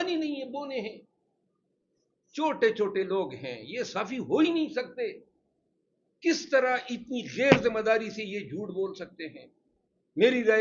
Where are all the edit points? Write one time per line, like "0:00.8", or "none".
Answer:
none